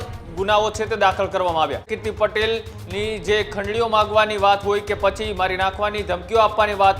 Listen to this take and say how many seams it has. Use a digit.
1